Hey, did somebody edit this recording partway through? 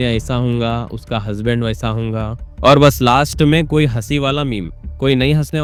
no; 0 cuts

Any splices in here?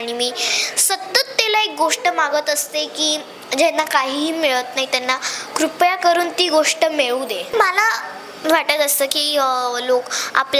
yes; 1 cut; at 7.5 s

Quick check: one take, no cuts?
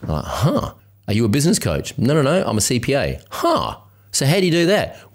yes; 0 cuts

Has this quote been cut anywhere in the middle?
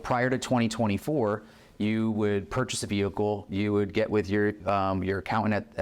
no; 0 cuts

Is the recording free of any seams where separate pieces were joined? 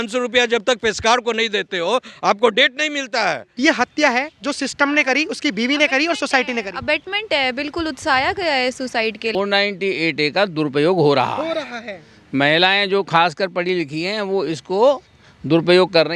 no; 2 cuts; at 3.5 s, 9.3 s

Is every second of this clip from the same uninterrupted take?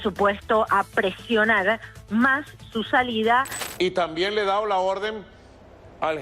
no; 1 cut; at 3.6 s

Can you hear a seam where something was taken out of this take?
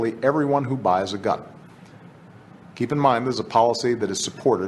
yes; 1 cut; at 1.5 s

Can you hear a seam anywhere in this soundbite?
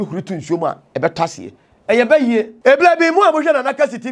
yes; 1 cut; at 2.5 s

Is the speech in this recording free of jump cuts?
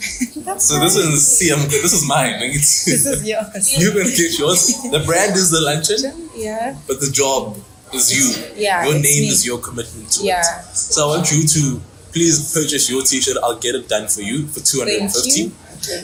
yes; 0 cuts

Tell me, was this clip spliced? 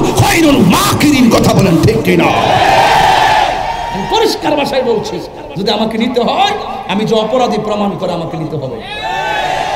yes; 1 cut; at 4.0 s

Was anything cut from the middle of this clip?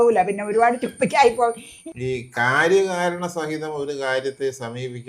yes; 1 cut; at 1.7 s

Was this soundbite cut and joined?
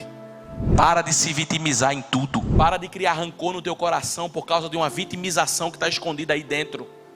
yes; 1 cut; at 2.5 s

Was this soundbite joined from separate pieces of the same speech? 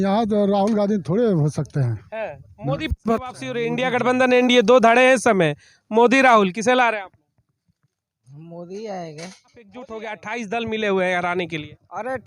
yes; 2 cuts; at 3.7 s, 10.0 s

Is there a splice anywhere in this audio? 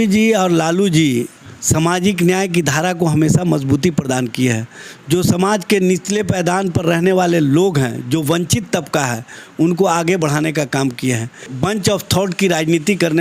yes; 1 cut; at 11.5 s

